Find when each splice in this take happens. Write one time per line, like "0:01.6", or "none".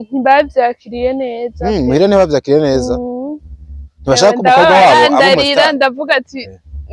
none